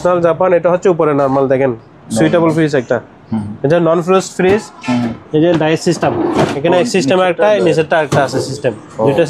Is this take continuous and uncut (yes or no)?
yes